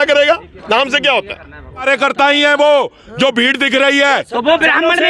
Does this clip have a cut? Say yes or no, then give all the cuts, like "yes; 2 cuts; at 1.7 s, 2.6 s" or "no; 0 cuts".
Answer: yes; 1 cut; at 1.8 s